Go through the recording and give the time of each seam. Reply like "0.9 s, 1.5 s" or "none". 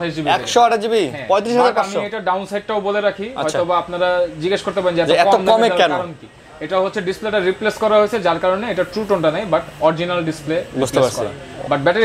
none